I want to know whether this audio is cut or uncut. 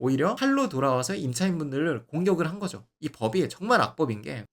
cut